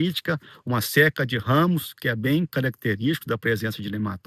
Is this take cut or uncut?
uncut